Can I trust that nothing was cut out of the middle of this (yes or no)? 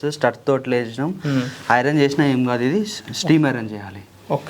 yes